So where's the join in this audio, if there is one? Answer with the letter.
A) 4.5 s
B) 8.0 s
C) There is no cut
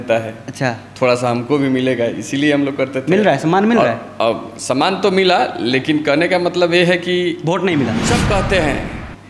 B